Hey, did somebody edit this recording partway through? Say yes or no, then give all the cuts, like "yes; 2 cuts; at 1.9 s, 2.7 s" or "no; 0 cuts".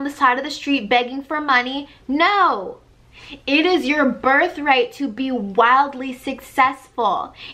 no; 0 cuts